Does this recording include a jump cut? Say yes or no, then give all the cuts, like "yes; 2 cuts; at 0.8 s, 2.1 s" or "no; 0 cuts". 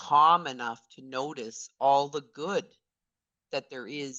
no; 0 cuts